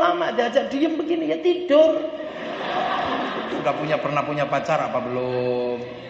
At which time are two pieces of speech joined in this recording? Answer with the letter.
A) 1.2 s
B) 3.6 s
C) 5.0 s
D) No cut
B